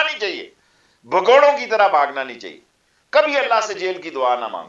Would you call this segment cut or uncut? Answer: uncut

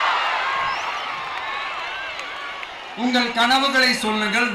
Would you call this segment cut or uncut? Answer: uncut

